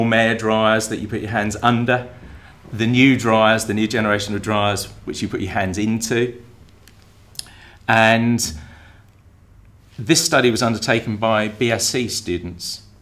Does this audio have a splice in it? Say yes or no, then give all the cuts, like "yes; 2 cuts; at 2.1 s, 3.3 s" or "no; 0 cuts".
no; 0 cuts